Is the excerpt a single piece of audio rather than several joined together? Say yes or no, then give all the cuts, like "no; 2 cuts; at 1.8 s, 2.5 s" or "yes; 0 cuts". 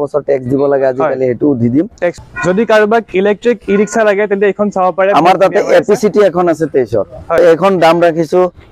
no; 2 cuts; at 2.2 s, 7.4 s